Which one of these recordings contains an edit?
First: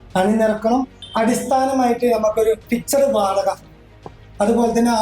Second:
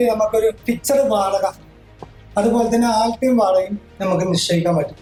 first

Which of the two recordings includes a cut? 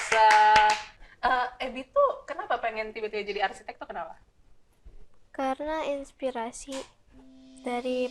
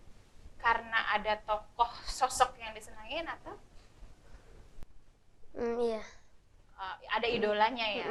first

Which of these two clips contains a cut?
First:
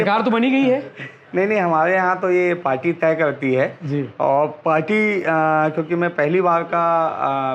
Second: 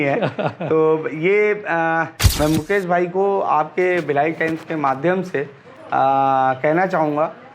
second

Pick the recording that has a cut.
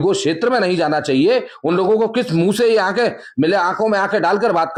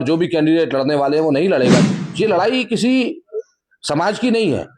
second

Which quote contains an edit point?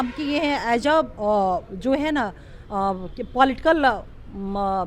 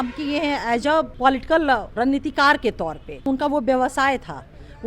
second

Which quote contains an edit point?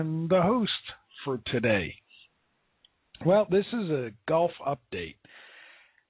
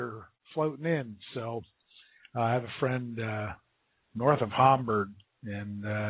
second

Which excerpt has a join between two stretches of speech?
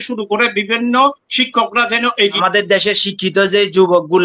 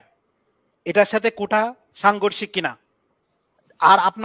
first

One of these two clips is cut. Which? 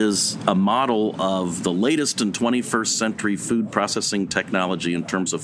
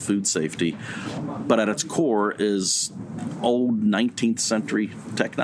second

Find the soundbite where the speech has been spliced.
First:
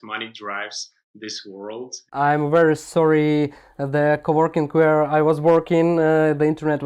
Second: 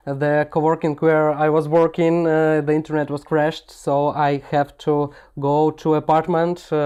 first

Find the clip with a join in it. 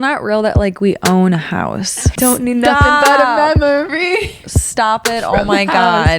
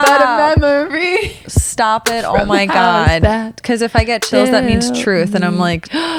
first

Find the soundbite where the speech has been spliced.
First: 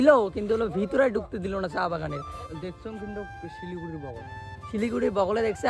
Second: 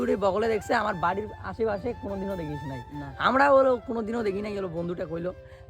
first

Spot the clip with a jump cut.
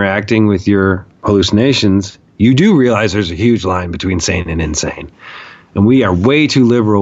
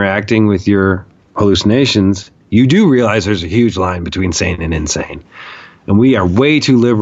first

